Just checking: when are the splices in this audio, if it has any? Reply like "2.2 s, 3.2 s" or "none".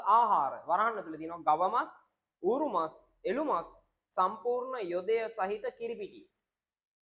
none